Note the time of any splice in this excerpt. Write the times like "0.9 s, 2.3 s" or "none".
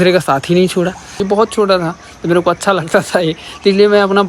1.2 s

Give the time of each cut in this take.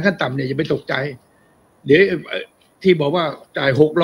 none

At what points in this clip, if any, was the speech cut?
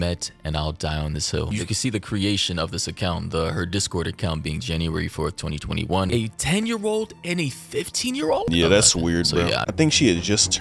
1.5 s, 6.1 s, 8.5 s, 9.7 s

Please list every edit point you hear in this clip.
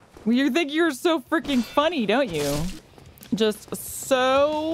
2.8 s

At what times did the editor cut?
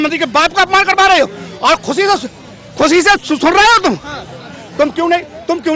none

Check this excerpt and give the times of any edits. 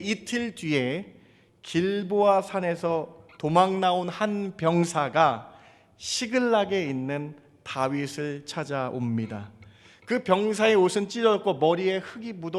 none

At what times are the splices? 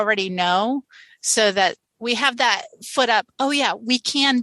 1.9 s

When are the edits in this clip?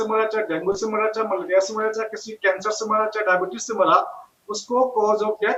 none

